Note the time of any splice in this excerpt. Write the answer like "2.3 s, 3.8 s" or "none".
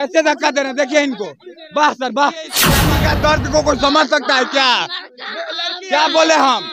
2.7 s

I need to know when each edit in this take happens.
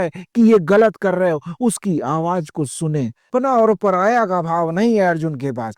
3.2 s

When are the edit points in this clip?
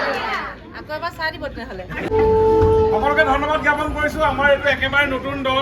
2.1 s

